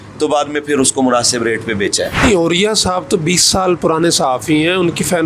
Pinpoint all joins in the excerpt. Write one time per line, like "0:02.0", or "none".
0:02.2